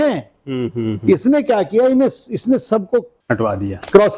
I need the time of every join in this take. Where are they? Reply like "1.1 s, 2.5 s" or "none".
3.1 s